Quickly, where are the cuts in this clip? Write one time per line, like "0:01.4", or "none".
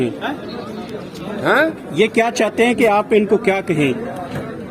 none